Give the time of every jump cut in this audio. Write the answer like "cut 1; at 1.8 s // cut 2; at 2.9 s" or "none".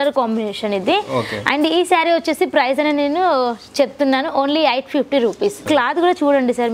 cut 1; at 5.7 s